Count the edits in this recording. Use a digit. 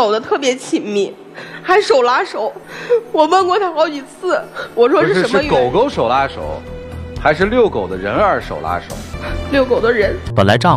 0